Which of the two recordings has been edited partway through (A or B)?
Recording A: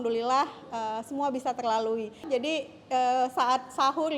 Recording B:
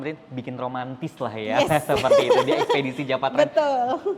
A